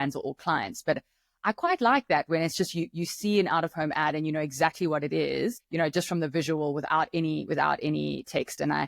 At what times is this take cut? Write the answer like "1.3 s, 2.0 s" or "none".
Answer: 5.6 s